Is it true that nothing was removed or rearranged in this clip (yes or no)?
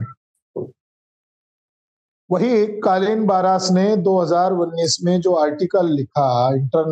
yes